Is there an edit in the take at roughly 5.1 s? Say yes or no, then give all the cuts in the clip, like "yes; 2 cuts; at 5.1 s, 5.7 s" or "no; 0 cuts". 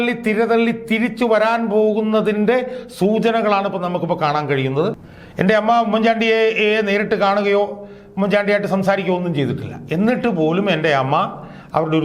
yes; 1 cut; at 5.1 s